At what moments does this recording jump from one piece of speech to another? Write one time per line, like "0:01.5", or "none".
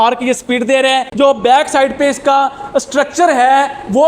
0:01.1